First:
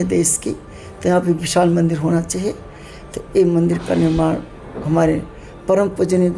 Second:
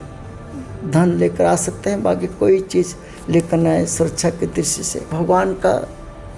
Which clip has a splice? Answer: second; 1 cut; at 5.0 s

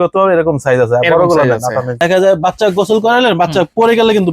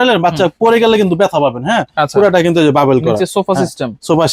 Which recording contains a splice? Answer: first; 1 cut; at 2.0 s

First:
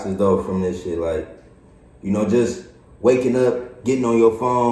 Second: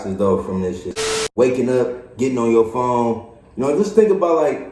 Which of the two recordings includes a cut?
second; 1 cut; at 0.9 s

